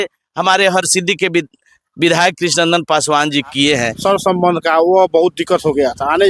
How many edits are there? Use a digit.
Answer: 1